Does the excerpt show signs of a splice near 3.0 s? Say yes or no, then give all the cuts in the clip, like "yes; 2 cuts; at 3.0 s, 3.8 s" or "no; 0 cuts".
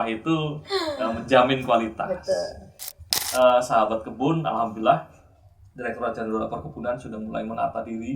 yes; 1 cut; at 3.0 s